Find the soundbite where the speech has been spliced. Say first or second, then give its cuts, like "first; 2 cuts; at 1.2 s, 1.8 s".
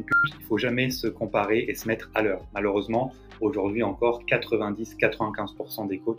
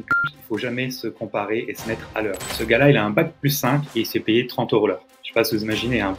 second; 1 cut; at 2.5 s